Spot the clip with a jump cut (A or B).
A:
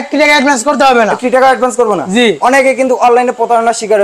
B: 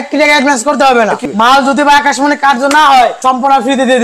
B